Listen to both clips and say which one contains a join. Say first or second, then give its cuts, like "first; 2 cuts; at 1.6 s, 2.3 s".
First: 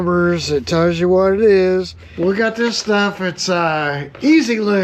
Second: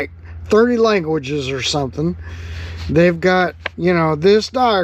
first; 1 cut; at 2.0 s